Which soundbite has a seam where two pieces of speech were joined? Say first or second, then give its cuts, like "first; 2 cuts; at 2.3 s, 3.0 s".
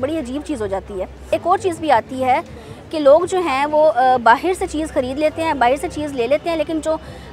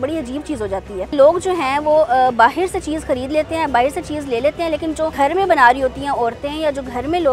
second; 2 cuts; at 1.1 s, 5.1 s